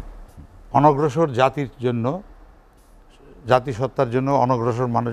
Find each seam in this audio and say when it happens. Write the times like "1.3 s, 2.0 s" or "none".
none